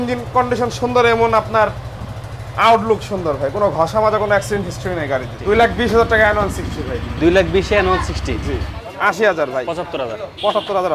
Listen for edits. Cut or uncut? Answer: cut